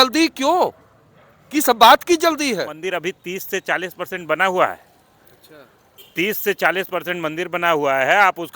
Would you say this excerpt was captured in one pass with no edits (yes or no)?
no